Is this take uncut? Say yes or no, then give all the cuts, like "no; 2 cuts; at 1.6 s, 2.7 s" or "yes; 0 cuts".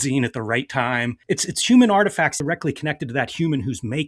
no; 2 cuts; at 1.1 s, 2.4 s